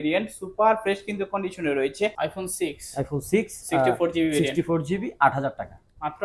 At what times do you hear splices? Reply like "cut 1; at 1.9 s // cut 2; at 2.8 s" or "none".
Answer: cut 1; at 2.2 s